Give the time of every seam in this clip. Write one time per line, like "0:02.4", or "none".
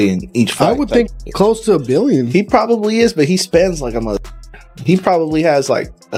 none